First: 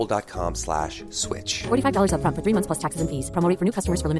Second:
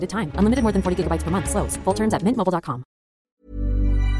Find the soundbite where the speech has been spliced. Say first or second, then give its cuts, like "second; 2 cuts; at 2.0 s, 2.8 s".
second; 1 cut; at 3.2 s